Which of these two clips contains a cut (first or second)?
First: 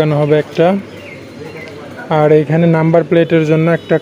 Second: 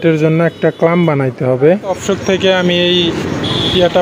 second